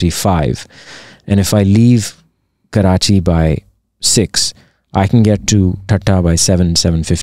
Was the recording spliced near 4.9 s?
no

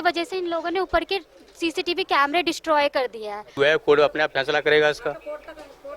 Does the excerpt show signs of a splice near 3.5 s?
yes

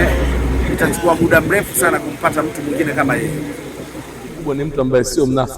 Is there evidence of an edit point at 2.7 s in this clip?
no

